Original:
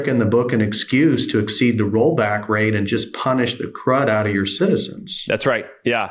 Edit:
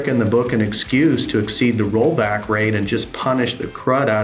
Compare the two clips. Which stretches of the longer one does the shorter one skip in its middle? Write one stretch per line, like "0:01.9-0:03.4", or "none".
none